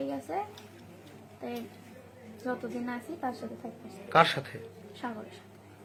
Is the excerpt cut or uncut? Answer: uncut